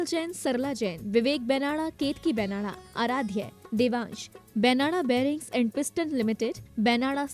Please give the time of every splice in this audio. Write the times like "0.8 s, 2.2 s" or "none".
none